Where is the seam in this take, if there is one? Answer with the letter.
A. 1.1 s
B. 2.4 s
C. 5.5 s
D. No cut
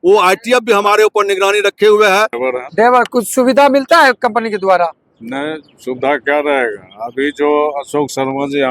B